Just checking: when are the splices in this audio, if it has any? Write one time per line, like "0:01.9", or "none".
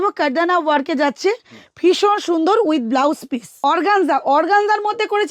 0:03.5